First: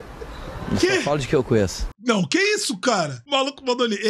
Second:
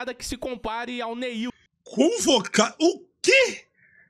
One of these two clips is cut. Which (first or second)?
first